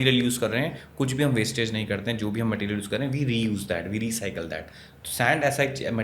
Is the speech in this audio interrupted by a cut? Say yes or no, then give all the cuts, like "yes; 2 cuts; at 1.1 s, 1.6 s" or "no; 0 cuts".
no; 0 cuts